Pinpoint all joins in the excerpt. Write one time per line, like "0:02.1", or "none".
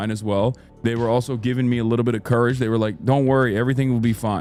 none